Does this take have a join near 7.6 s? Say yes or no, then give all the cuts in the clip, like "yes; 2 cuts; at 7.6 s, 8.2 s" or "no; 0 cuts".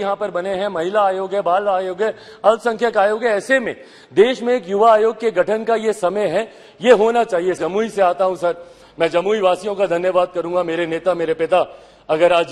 yes; 1 cut; at 7.6 s